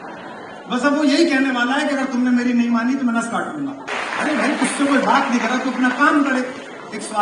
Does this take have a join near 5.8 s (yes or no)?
no